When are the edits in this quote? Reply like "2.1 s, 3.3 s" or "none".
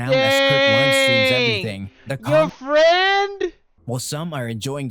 3.7 s